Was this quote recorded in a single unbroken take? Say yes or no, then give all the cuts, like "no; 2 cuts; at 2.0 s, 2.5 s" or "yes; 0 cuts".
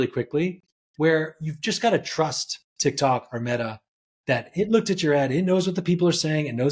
yes; 0 cuts